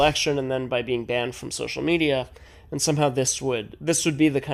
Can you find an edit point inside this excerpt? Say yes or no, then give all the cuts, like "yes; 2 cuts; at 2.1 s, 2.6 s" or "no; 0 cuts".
no; 0 cuts